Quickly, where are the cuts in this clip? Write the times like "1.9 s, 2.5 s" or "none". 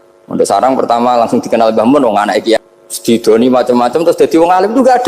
2.6 s